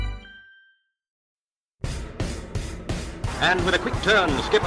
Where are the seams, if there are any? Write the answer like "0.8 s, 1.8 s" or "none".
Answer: 1.2 s